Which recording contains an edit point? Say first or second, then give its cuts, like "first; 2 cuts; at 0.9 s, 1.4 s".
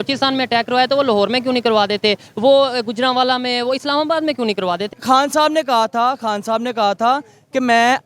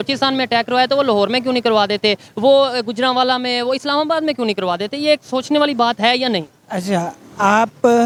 first; 1 cut; at 4.9 s